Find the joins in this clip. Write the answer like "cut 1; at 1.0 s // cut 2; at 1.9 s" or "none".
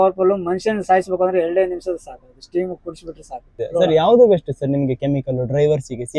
cut 1; at 3.4 s